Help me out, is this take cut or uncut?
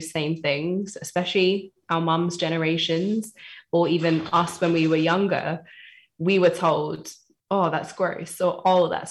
uncut